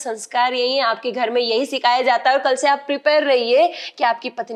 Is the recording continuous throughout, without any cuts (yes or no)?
yes